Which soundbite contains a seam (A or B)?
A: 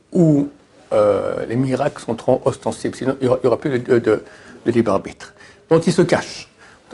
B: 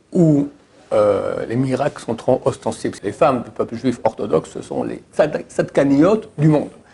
B